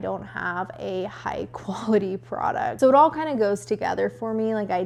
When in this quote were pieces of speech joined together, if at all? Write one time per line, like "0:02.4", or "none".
none